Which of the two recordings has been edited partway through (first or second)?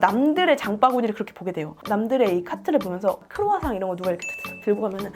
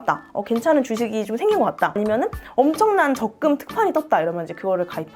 first